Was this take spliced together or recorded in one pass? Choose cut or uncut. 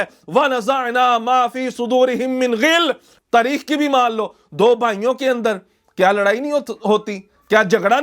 cut